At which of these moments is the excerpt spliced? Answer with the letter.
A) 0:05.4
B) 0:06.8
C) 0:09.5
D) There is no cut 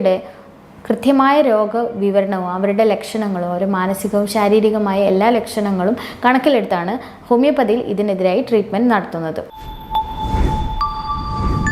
C